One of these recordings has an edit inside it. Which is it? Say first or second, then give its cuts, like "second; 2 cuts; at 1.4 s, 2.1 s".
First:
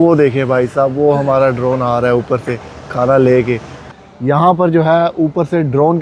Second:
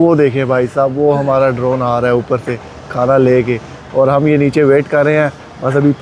first; 1 cut; at 3.8 s